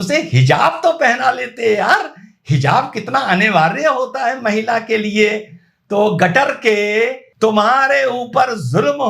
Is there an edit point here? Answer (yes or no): yes